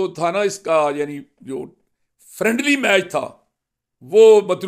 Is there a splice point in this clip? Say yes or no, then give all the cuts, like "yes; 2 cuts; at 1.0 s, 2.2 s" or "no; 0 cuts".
no; 0 cuts